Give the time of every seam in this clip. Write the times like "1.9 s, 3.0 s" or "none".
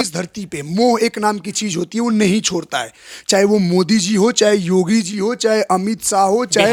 none